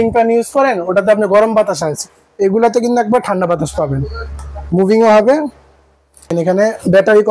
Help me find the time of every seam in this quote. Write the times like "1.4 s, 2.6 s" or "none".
6.3 s